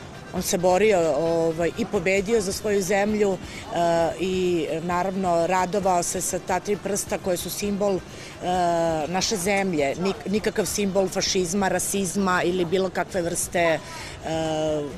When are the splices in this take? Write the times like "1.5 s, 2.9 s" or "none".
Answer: 7.0 s